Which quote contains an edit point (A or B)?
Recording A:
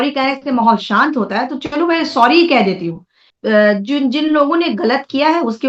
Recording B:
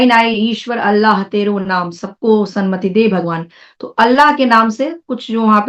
A